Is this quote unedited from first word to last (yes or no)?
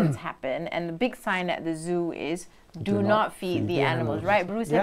yes